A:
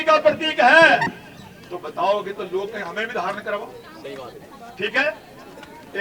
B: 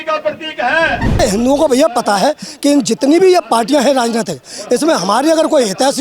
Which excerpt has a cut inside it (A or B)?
B